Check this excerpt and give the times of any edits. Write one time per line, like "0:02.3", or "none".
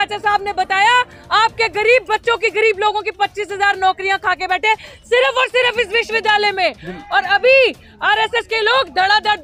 none